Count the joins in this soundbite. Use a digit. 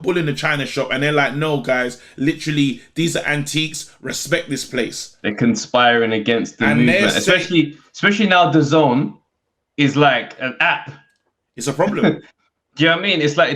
0